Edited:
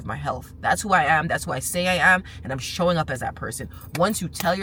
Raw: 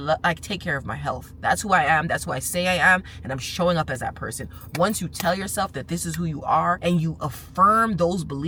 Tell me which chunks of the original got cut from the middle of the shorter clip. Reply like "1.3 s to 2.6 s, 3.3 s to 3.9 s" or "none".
none